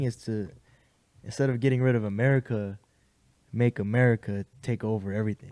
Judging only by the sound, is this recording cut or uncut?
uncut